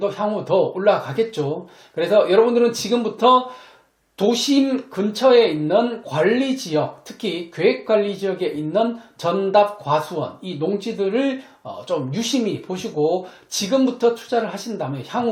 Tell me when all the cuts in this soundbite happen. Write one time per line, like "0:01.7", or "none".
none